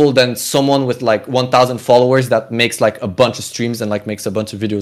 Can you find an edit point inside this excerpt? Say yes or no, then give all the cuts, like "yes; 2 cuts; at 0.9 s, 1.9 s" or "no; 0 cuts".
no; 0 cuts